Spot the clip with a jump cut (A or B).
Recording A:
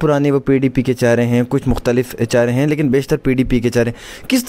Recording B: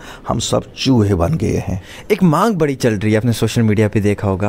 B